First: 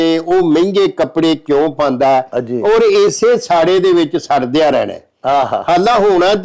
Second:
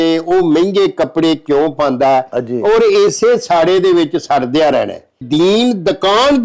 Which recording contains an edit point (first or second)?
second